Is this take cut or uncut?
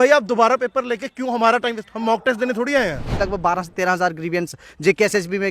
cut